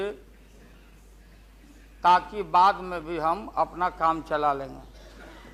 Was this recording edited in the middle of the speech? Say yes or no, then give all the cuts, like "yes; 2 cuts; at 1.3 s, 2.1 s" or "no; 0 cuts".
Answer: no; 0 cuts